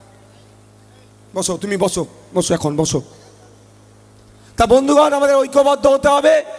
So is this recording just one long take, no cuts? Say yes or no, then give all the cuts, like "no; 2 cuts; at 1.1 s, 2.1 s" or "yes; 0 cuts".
yes; 0 cuts